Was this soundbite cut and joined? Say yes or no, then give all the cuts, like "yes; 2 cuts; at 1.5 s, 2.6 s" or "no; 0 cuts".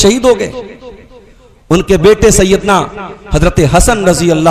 no; 0 cuts